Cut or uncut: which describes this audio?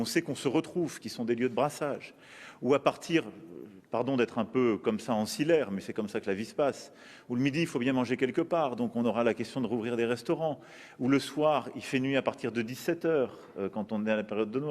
cut